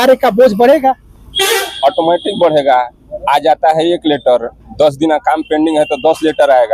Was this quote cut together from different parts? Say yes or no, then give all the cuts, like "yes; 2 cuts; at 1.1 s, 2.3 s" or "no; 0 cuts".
no; 0 cuts